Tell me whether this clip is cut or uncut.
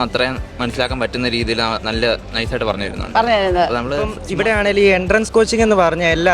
cut